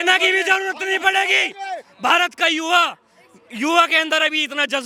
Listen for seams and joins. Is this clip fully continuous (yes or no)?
yes